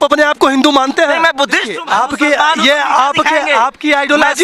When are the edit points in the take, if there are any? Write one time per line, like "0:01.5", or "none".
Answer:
0:01.7